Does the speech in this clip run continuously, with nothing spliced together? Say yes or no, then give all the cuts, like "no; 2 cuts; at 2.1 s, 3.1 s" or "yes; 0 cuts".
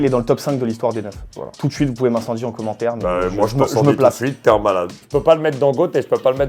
no; 1 cut; at 5.0 s